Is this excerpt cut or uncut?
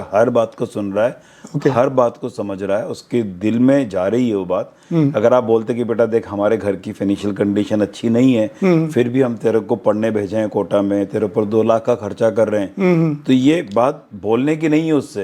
uncut